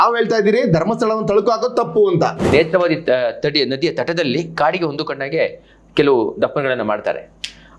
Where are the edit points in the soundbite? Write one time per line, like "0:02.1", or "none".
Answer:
0:02.4